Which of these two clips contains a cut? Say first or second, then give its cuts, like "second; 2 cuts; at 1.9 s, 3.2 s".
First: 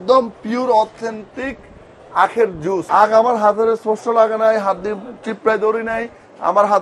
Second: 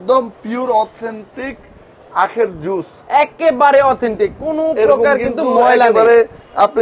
first; 1 cut; at 2.8 s